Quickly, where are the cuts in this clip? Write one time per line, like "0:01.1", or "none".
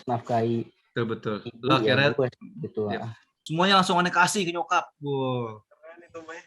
0:03.4